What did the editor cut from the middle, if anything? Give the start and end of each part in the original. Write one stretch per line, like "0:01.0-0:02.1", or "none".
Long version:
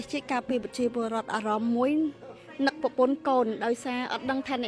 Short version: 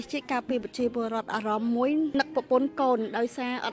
0:02.1-0:02.6